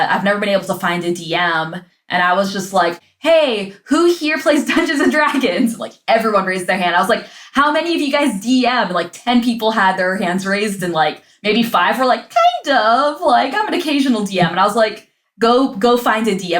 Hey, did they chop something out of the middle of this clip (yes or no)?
yes